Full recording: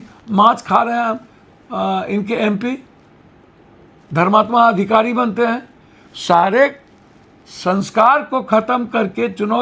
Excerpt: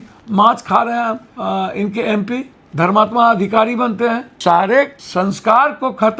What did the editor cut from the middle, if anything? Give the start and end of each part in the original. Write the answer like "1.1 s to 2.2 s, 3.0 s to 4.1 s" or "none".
1.3 s to 1.6 s, 2.9 s to 4.0 s, 5.7 s to 6.1 s, 6.8 s to 7.5 s